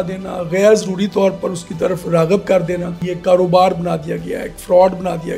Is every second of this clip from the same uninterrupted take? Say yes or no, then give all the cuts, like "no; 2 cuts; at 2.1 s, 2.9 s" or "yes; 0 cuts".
no; 1 cut; at 3.0 s